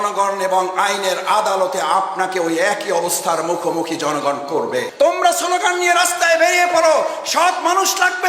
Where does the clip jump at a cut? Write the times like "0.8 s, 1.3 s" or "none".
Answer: 4.9 s